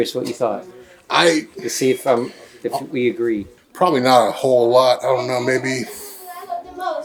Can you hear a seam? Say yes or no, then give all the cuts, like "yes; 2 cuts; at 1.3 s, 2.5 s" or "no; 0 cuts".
no; 0 cuts